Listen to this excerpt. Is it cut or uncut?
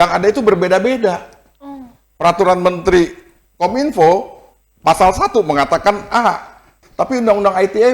cut